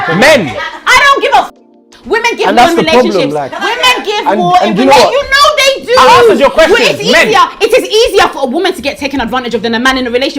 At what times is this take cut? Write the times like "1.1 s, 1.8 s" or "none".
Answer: 3.4 s